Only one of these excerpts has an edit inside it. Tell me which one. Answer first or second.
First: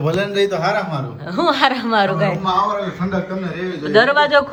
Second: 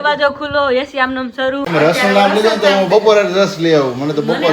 second